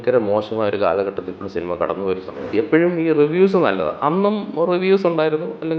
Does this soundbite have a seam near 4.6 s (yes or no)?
no